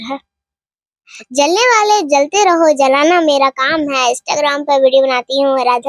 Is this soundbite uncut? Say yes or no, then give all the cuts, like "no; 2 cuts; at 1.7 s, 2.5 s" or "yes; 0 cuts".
no; 1 cut; at 1.1 s